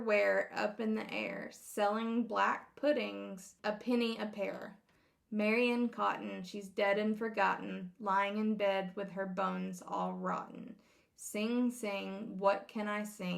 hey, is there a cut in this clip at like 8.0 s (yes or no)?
no